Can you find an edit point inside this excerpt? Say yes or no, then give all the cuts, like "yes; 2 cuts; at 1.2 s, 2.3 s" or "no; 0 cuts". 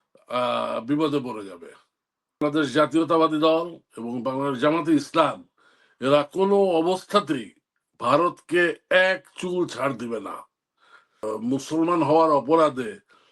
yes; 2 cuts; at 2.4 s, 11.2 s